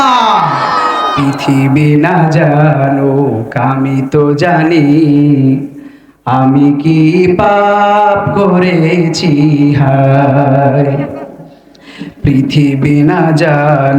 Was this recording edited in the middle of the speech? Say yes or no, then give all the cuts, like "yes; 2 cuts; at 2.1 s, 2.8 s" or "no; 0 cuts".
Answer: yes; 1 cut; at 1.1 s